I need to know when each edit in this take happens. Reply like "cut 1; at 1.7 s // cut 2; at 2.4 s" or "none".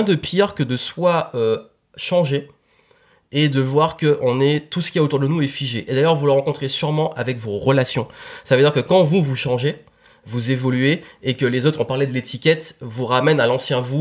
none